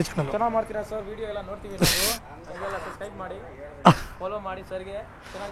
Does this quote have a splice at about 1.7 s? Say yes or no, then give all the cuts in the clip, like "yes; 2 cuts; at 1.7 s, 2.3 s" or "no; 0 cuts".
no; 0 cuts